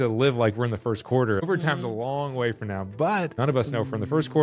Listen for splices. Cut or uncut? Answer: cut